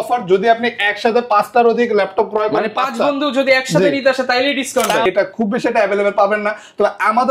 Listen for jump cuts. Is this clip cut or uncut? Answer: cut